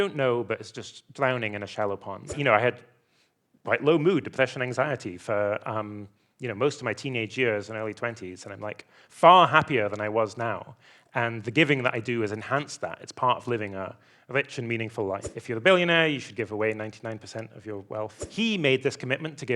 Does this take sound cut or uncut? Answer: cut